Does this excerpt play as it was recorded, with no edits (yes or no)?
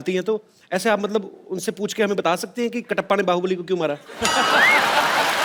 yes